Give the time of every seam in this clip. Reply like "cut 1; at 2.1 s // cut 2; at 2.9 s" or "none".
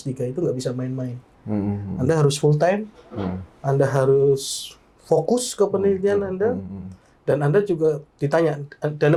none